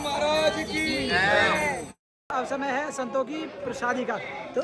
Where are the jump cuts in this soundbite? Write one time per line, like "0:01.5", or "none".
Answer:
0:02.2